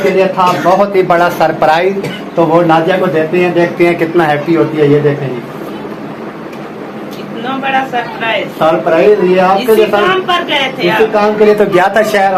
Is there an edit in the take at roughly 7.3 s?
no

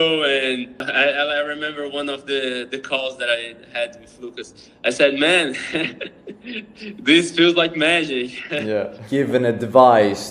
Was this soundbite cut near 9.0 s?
yes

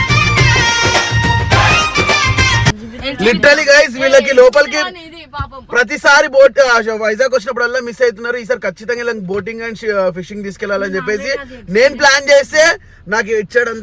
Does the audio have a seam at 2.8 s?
no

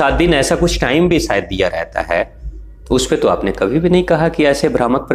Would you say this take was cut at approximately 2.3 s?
no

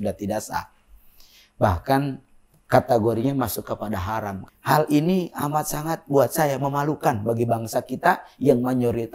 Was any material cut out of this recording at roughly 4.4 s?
yes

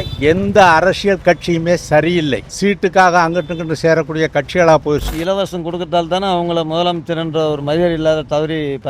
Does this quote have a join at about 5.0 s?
yes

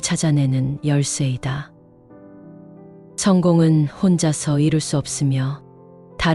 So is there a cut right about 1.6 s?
yes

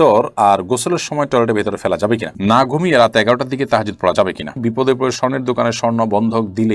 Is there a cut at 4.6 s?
yes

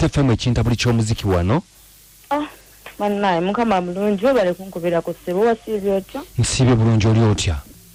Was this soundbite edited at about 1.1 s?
no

